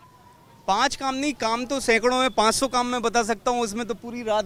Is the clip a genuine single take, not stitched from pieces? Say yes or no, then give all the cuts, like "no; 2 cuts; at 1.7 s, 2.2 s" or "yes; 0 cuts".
yes; 0 cuts